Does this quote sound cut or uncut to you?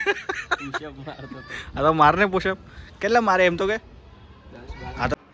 uncut